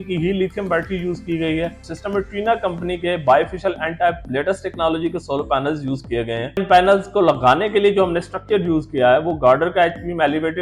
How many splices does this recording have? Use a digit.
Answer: 2